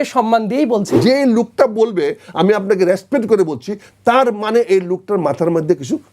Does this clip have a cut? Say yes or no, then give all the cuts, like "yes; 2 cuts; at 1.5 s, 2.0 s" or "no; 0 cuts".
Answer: yes; 1 cut; at 0.9 s